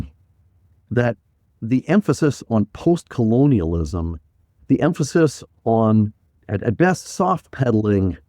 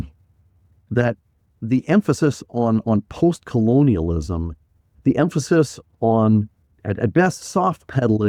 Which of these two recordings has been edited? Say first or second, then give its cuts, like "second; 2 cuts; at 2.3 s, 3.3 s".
first; 1 cut; at 2.5 s